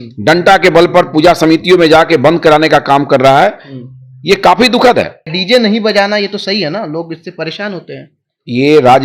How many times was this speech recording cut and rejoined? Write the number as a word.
one